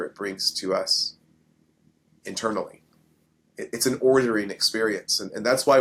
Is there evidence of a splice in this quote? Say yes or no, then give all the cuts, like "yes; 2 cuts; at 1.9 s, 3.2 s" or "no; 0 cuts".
no; 0 cuts